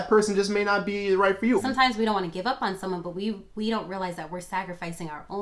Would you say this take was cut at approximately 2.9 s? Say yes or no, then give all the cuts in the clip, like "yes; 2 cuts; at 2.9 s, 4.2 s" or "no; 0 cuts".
no; 1 cut; at 1.6 s